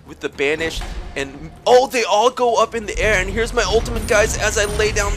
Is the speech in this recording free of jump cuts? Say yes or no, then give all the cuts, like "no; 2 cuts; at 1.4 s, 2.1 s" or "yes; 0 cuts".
yes; 0 cuts